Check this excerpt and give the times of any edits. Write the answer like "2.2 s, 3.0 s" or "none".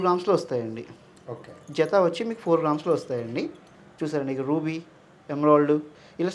none